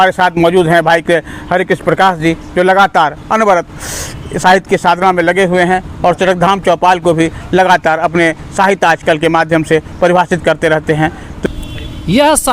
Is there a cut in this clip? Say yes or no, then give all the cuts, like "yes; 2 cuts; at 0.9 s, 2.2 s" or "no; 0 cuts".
yes; 1 cut; at 11.5 s